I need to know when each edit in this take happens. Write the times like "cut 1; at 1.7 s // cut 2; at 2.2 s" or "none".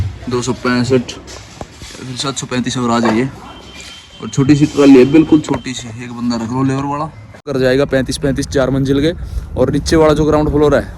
cut 1; at 7.5 s